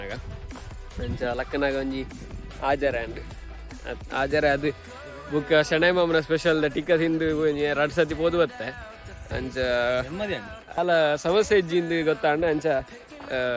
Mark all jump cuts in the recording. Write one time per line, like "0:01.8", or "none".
0:10.8